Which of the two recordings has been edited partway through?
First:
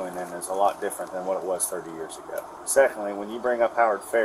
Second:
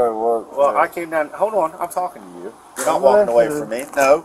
first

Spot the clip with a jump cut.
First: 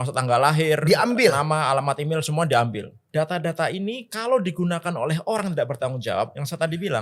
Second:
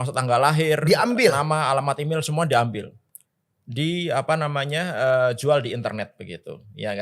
first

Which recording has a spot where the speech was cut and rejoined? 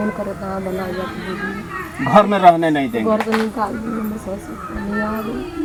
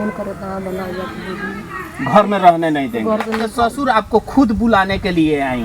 second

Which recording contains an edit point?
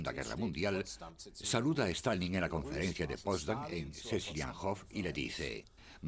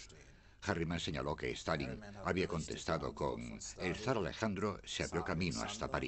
second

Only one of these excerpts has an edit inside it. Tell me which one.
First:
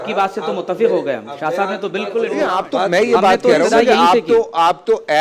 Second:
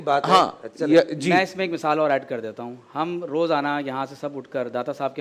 first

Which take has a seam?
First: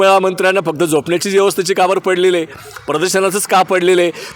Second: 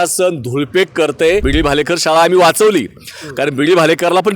second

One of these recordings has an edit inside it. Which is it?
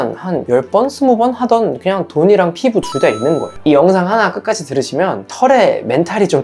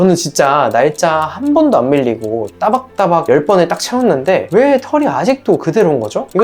first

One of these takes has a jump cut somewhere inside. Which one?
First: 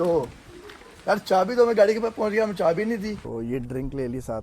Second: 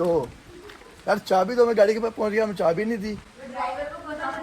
first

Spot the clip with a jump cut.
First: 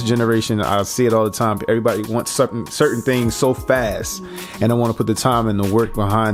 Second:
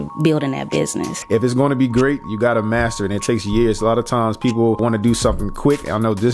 second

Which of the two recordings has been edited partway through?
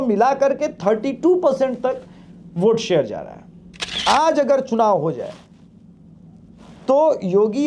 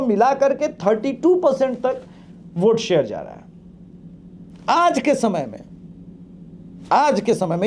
first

